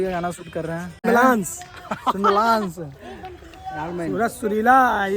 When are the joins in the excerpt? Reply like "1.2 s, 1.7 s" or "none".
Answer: 1.1 s